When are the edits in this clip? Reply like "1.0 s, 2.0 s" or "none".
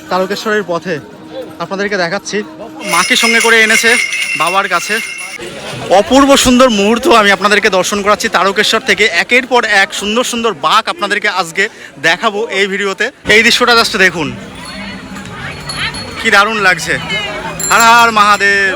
2.9 s, 5.4 s, 13.2 s